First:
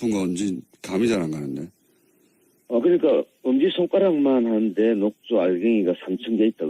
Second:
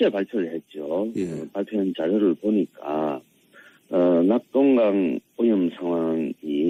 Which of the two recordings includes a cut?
first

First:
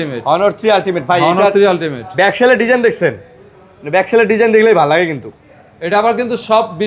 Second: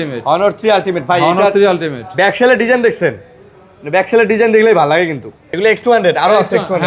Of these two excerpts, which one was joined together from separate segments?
second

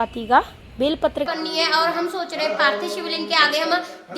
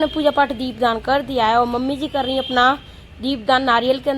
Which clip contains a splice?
first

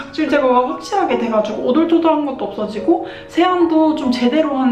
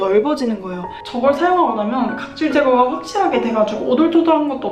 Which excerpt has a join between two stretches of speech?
second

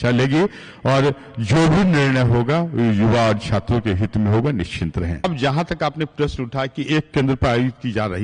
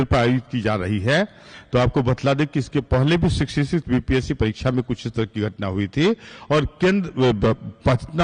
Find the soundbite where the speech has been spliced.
first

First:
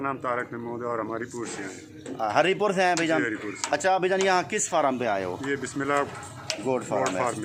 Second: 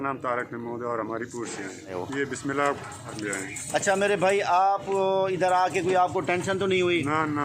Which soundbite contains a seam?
second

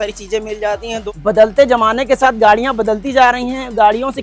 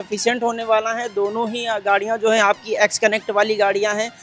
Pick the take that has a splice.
first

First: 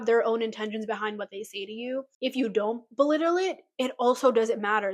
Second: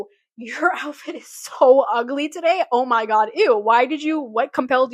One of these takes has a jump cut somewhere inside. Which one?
first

